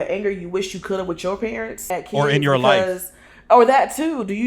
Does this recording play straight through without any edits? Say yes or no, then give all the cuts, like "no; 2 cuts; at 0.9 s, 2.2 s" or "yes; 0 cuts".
no; 1 cut; at 2.1 s